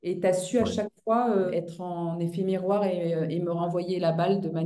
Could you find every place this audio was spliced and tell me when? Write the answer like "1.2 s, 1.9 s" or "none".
1.5 s